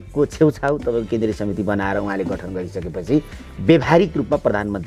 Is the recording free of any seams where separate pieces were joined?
yes; 0 cuts

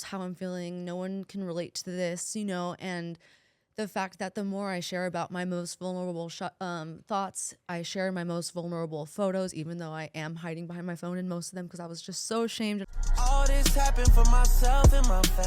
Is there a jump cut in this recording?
yes; 1 cut; at 12.8 s

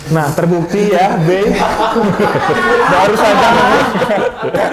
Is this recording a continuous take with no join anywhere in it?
yes; 0 cuts

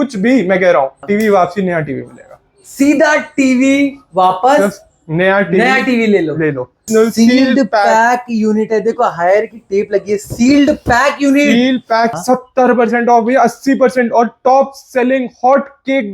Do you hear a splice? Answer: yes; 3 cuts; at 0.9 s, 6.9 s, 12.1 s

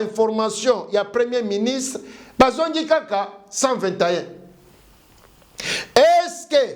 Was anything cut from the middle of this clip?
no; 0 cuts

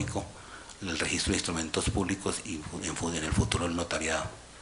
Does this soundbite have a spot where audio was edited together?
no; 0 cuts

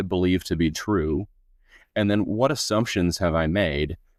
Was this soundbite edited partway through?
no; 0 cuts

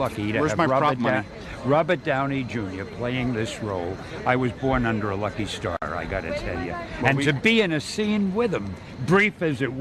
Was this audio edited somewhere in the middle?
no; 0 cuts

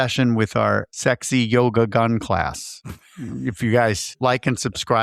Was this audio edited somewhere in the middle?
yes; 1 cut; at 0.9 s

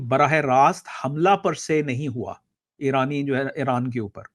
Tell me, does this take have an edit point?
no; 0 cuts

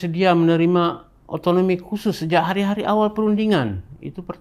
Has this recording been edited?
no; 0 cuts

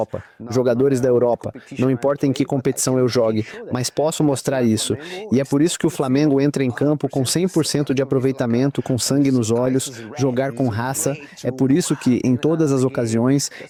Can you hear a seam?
no; 0 cuts

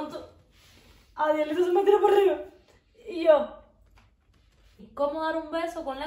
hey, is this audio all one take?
no; 1 cut; at 4.8 s

